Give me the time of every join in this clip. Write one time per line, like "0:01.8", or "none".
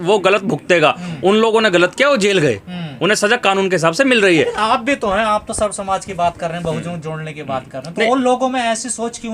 none